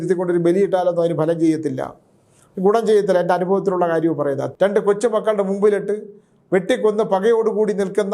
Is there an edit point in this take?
yes; 1 cut; at 4.4 s

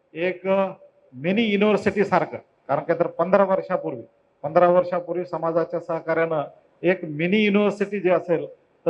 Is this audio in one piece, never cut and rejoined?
yes; 0 cuts

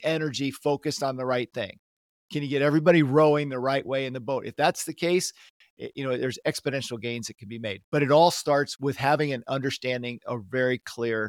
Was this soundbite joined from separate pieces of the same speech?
yes; 1 cut; at 8.7 s

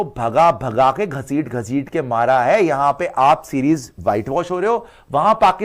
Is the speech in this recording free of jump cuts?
yes; 0 cuts

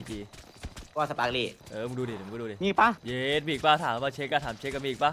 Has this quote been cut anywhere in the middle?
yes; 2 cuts; at 1.6 s, 3.1 s

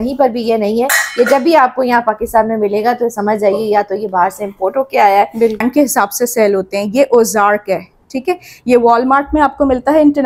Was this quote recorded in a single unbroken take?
no; 1 cut; at 5.6 s

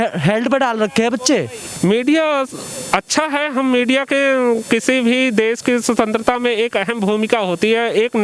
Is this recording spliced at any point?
yes; 1 cut; at 1.6 s

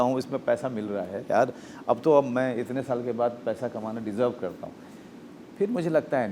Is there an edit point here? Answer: no; 0 cuts

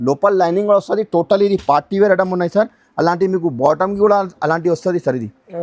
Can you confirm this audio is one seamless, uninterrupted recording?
yes; 0 cuts

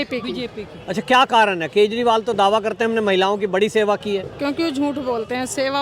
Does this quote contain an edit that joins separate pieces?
no; 0 cuts

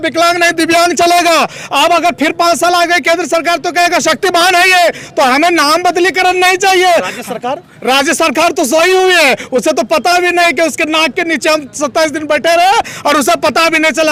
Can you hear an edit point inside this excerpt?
no; 0 cuts

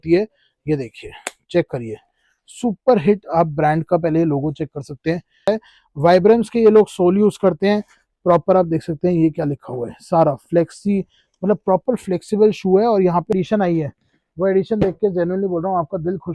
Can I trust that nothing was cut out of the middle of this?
no; 2 cuts; at 5.5 s, 13.3 s

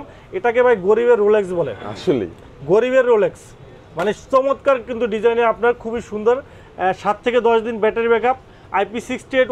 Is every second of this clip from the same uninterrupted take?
yes; 0 cuts

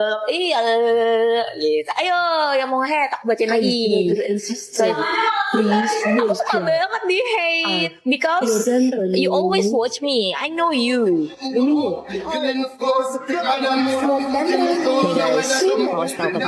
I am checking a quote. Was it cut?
no; 0 cuts

